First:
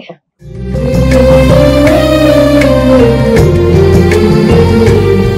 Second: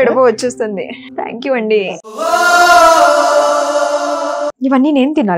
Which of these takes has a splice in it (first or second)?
second